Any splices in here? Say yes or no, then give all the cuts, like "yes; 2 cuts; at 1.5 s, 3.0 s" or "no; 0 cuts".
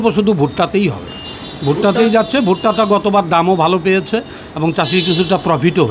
no; 0 cuts